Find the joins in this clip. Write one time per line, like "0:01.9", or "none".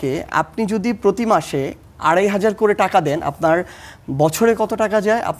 none